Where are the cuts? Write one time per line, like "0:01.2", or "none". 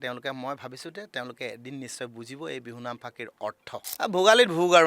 0:03.9